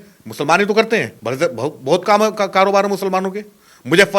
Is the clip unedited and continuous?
no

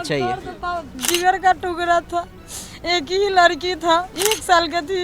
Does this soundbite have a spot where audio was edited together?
yes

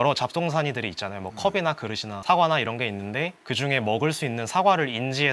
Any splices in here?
no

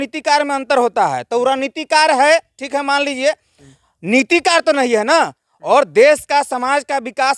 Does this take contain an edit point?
no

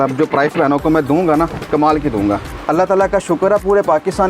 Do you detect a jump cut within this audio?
yes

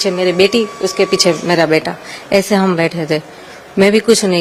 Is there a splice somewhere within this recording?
no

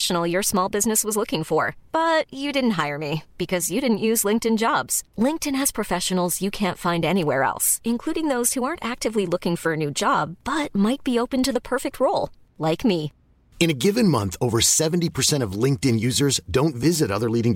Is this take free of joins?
yes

